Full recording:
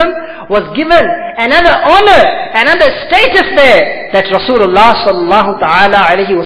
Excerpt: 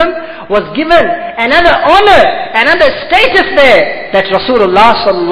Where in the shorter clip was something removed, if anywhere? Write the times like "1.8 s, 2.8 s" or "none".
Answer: none